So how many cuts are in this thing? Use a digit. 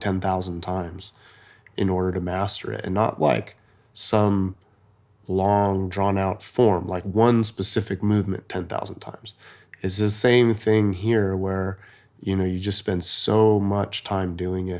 1